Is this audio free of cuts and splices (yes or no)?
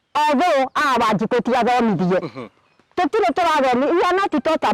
yes